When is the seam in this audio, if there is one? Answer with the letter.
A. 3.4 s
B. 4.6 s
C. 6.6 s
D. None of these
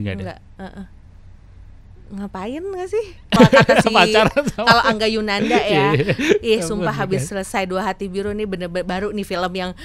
A